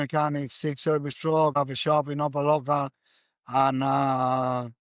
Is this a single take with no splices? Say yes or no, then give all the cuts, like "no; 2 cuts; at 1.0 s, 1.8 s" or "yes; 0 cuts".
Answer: no; 1 cut; at 1.5 s